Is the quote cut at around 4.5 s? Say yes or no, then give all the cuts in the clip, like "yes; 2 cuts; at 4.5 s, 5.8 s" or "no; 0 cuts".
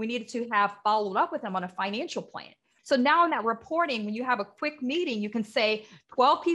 no; 1 cut; at 2.7 s